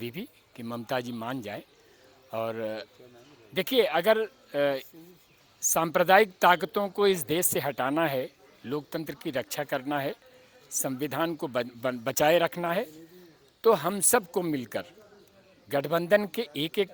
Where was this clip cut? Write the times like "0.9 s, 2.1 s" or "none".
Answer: none